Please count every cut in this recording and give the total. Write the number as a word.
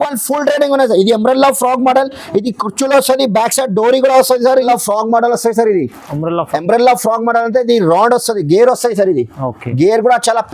one